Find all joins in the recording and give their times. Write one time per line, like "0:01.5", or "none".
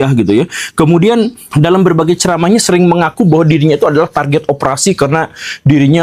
none

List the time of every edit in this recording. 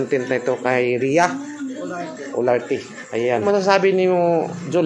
0:03.4

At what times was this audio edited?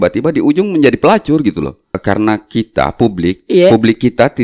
0:02.0

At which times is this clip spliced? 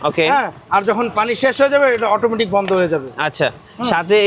none

